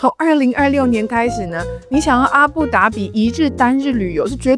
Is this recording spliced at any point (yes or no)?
no